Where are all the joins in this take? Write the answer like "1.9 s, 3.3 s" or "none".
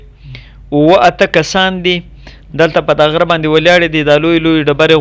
none